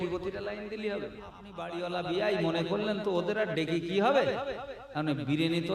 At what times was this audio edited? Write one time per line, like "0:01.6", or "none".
0:01.6